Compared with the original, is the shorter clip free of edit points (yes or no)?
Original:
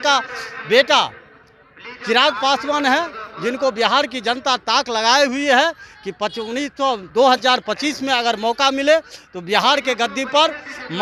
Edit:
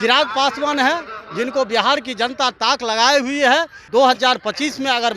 no